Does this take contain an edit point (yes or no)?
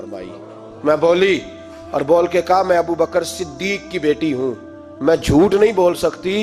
no